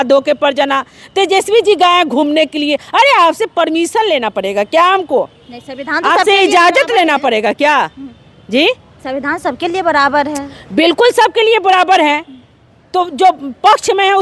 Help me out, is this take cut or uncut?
uncut